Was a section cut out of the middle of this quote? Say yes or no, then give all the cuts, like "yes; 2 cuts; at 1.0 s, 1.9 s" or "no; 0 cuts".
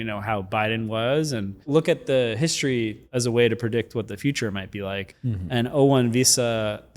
yes; 3 cuts; at 1.6 s, 3.0 s, 5.1 s